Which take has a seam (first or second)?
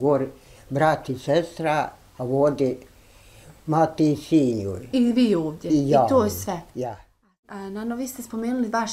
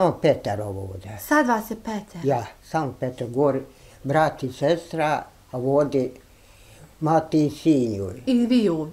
first